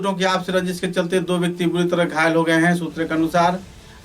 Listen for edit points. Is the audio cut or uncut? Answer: uncut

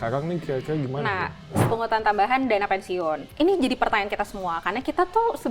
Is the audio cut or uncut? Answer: cut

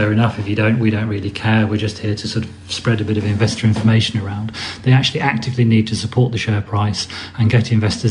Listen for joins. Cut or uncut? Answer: uncut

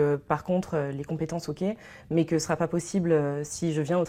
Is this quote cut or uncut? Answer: uncut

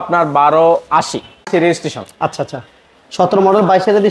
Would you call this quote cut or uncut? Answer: cut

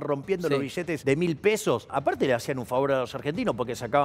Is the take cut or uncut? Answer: cut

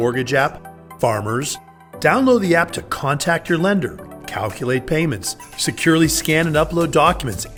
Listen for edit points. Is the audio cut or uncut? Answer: uncut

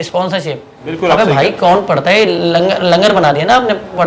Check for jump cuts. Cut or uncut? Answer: cut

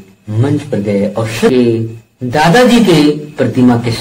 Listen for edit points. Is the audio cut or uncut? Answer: cut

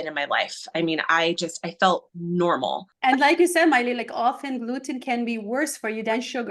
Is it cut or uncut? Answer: cut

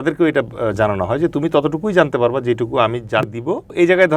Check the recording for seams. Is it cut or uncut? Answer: cut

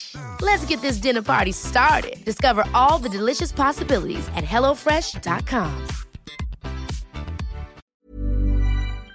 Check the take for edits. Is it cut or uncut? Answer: cut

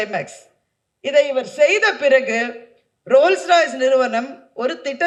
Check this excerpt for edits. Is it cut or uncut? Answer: uncut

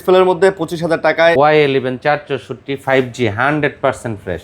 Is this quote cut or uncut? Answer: cut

